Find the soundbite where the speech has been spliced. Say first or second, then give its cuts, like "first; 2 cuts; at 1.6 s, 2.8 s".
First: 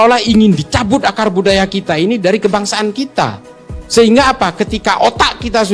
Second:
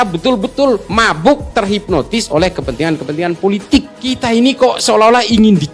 second; 1 cut; at 4.0 s